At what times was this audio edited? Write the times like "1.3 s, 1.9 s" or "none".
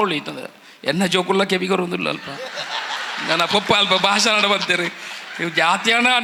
none